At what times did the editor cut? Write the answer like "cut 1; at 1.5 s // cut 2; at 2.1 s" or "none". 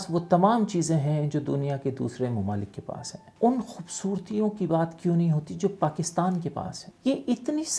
cut 1; at 3.2 s // cut 2; at 6.7 s

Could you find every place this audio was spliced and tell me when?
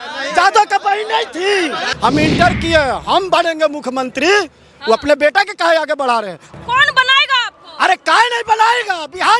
cut 1; at 1.9 s // cut 2; at 6.5 s

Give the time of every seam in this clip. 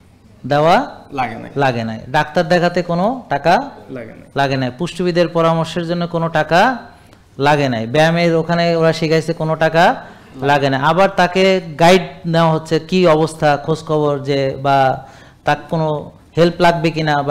none

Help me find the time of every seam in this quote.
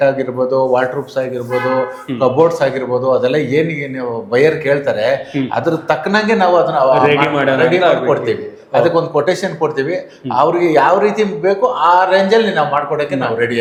none

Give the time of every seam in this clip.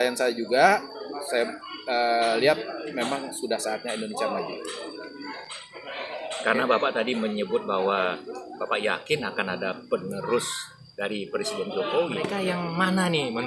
cut 1; at 12.3 s

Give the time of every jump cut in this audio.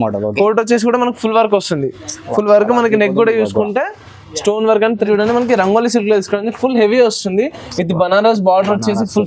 cut 1; at 5.1 s

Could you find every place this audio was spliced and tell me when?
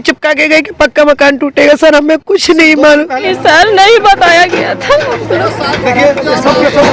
cut 1; at 3.3 s

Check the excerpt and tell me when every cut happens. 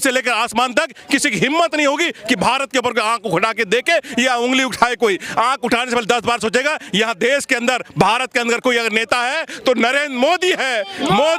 none

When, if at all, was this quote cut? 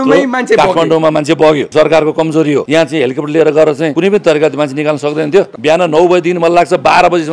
cut 1; at 1.7 s // cut 2; at 2.7 s // cut 3; at 3.9 s // cut 4; at 5.5 s

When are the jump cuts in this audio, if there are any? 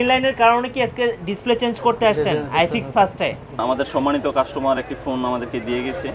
cut 1; at 3.6 s

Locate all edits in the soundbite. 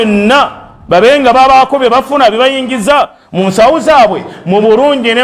none

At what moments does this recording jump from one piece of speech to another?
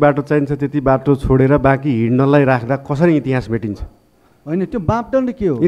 none

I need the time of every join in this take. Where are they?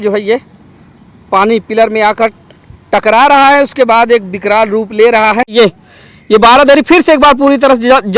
cut 1; at 5.5 s

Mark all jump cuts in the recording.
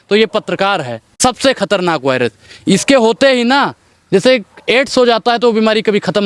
cut 1; at 1.0 s

